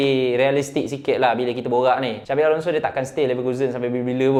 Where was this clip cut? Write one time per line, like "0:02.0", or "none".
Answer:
none

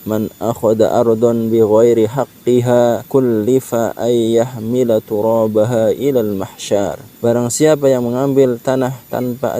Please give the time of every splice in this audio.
0:03.0
0:07.0

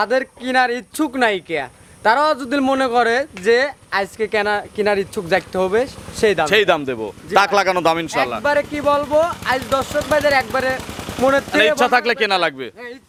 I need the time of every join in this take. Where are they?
none

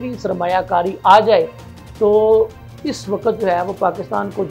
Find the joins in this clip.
none

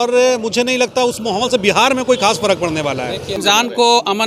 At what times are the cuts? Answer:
0:03.4

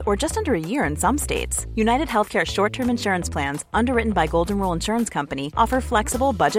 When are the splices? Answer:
none

